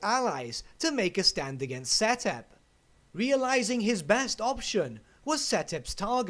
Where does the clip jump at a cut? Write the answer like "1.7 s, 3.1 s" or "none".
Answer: 3.7 s